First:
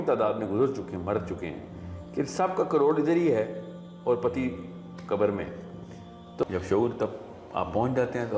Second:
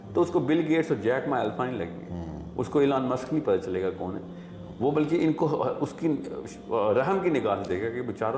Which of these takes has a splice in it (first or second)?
first